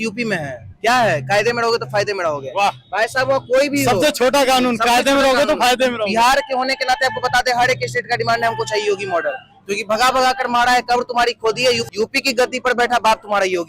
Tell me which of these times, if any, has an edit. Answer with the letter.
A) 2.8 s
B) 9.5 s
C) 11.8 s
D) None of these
C